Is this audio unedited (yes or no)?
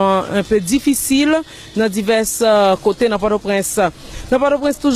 no